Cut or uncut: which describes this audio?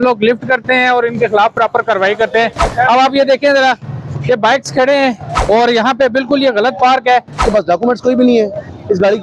cut